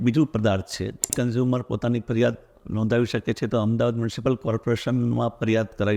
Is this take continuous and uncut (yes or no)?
no